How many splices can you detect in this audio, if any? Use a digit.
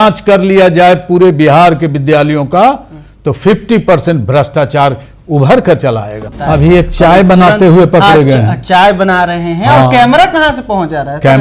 1